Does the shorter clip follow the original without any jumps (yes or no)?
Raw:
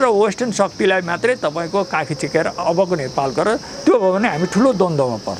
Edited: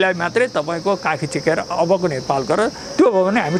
yes